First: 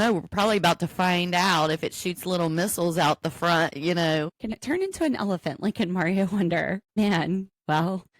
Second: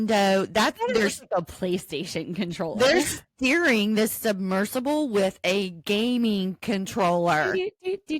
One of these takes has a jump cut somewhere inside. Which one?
first; 1 cut; at 7.0 s

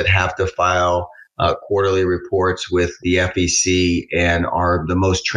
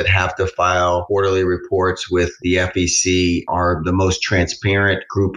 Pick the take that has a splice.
second; 2 cuts; at 1.0 s, 3.5 s

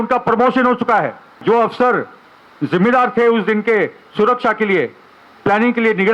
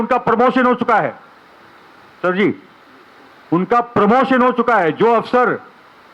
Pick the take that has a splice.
first; 1 cut; at 1.4 s

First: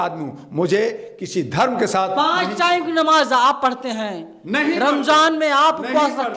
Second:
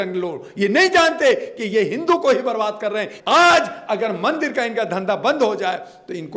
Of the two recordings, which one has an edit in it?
second; 1 cut; at 3.1 s

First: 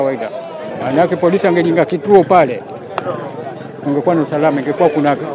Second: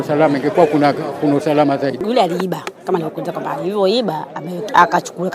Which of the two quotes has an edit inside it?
second; 1 cut; at 2.0 s

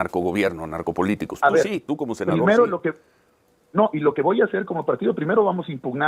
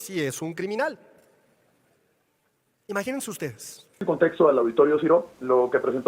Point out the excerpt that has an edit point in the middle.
second; 1 cut; at 4.0 s

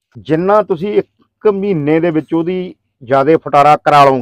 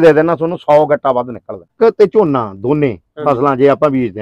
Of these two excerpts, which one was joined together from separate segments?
second; 1 cut; at 1.7 s

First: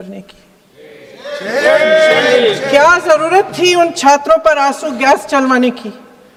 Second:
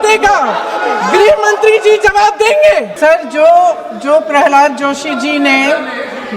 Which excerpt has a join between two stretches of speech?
second; 1 cut; at 2.9 s

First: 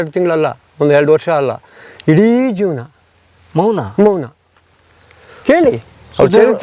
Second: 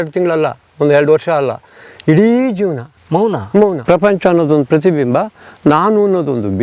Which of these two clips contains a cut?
second; 2 cuts; at 2.9 s, 3.8 s

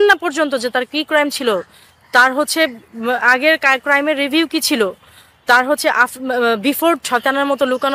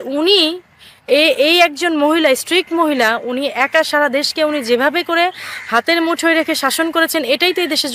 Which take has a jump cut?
first; 1 cut; at 7.0 s

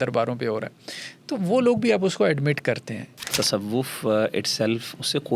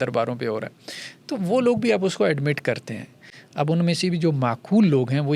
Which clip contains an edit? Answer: first; 1 cut; at 3.3 s

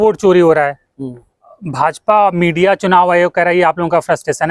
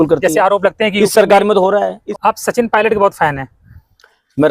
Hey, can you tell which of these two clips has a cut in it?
second; 1 cut; at 2.0 s

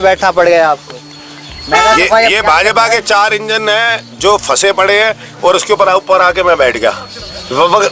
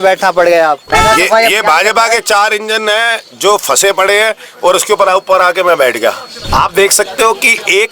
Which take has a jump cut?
second; 2 cuts; at 0.8 s, 6.3 s

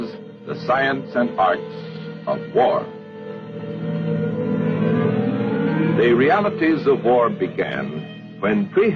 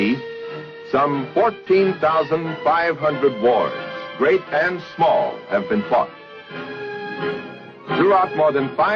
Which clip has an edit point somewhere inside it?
second; 1 cut; at 2.2 s

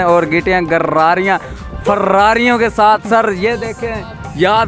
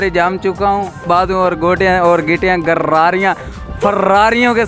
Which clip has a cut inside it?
second; 1 cut; at 1.0 s

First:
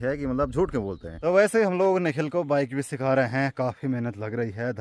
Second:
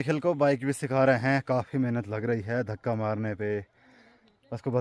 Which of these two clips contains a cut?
first; 1 cut; at 1.1 s

